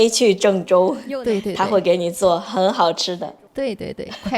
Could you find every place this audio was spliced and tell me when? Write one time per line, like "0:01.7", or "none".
0:03.2